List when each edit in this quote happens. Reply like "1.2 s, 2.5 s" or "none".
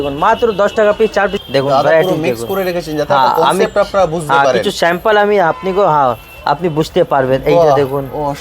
1.4 s